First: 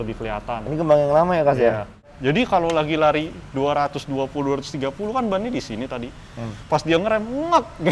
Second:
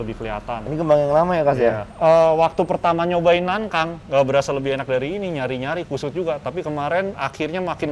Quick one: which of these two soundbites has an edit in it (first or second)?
first